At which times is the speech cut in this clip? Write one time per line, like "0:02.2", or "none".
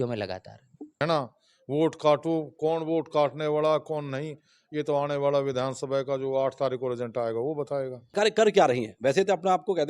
0:01.0
0:08.1